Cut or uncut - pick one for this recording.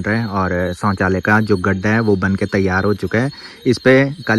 uncut